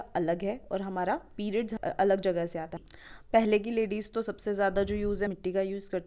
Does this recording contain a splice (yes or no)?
yes